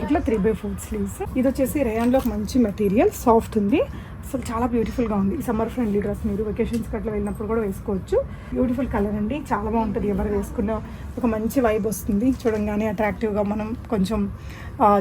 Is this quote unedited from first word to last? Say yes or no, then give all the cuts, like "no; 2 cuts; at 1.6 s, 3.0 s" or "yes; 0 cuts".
no; 2 cuts; at 1.2 s, 8.4 s